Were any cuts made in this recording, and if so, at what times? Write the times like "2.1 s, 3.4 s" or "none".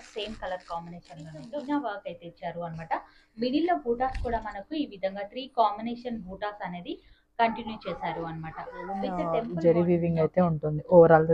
1.6 s, 9.4 s